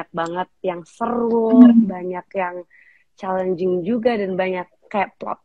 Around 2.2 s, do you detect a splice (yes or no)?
no